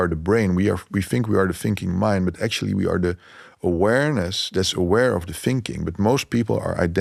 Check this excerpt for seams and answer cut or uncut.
uncut